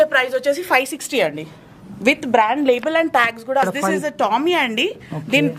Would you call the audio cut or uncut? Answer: cut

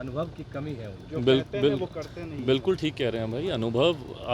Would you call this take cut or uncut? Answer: uncut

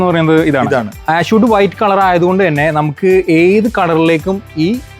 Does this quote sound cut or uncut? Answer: cut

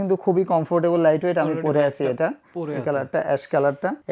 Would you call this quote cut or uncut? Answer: uncut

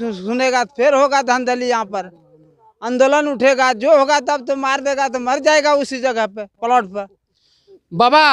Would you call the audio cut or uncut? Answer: uncut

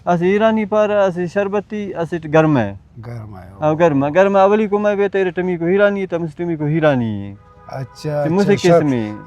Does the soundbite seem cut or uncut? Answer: uncut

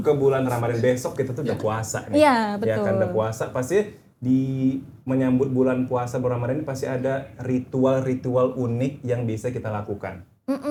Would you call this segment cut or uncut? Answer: uncut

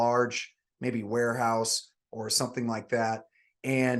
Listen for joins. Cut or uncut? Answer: uncut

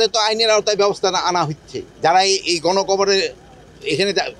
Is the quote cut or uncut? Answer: uncut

